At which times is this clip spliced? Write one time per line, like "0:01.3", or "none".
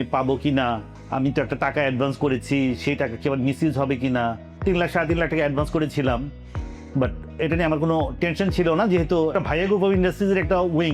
0:00.9
0:04.5